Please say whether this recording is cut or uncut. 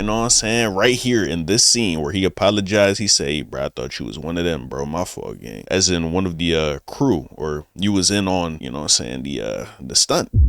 uncut